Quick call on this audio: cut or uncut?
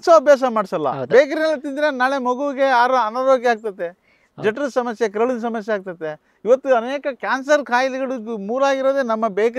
uncut